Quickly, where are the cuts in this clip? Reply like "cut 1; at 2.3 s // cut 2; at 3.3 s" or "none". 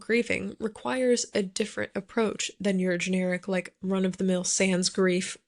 none